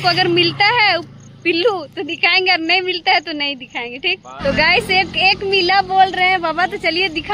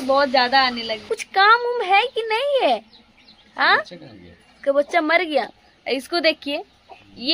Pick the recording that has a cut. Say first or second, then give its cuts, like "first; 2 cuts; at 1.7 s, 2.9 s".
second; 1 cut; at 1.1 s